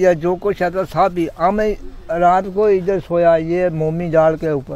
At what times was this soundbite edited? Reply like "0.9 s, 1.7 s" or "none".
none